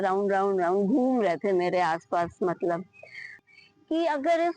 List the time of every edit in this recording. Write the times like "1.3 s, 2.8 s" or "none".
3.5 s